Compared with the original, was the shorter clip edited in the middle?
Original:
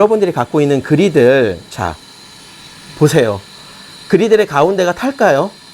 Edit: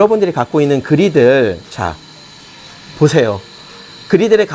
no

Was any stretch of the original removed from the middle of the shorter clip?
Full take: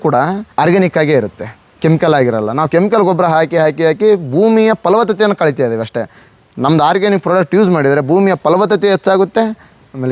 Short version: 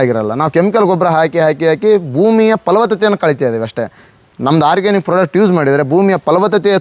no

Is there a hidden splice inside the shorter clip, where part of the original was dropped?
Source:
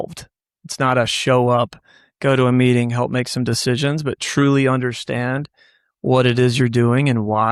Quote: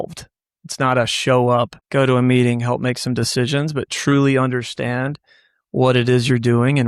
yes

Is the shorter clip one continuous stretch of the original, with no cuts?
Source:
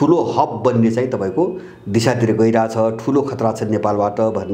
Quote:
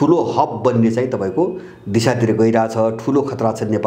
yes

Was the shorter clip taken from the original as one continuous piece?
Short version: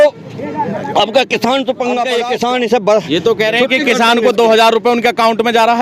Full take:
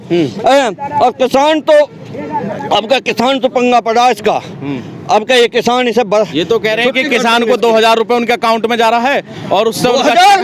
no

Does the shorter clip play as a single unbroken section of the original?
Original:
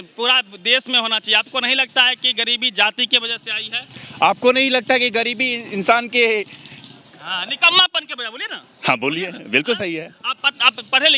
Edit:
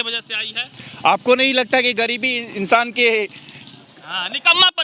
yes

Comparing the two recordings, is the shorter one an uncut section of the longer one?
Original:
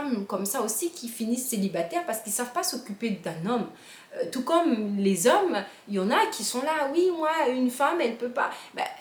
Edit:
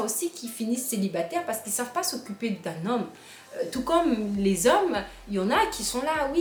yes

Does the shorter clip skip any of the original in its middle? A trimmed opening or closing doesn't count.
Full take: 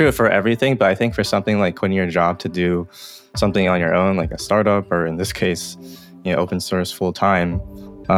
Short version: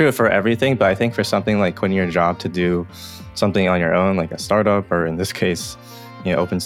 no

